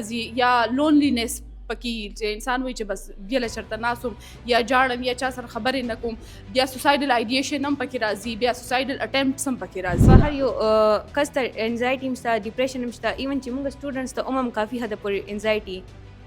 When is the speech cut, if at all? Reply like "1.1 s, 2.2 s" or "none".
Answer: 10.1 s